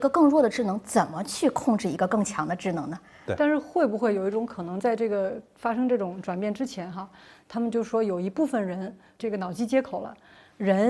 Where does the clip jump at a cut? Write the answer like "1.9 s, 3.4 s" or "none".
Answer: 3.2 s